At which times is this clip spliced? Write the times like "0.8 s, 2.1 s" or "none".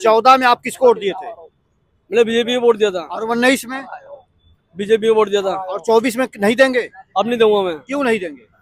none